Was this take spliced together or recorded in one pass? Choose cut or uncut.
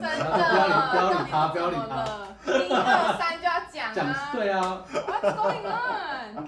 uncut